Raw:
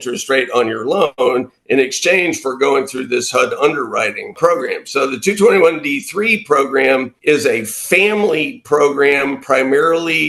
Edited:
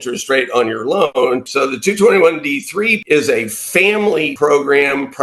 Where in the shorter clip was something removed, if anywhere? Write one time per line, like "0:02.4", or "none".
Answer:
0:01.2
0:03.0
0:04.3